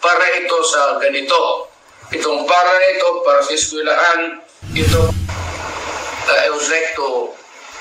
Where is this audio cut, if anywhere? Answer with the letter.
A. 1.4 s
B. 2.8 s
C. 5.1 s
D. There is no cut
C